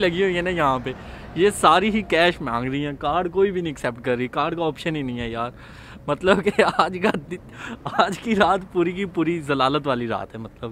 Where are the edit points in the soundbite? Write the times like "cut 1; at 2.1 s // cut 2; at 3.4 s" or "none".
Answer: none